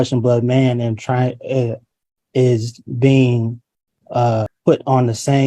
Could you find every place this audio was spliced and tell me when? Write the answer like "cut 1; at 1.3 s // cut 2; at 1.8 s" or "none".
cut 1; at 4.5 s